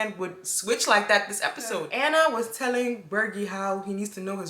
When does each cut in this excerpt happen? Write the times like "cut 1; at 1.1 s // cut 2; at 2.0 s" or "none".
cut 1; at 1.9 s